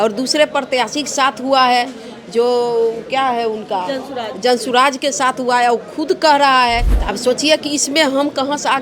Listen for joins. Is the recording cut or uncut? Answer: cut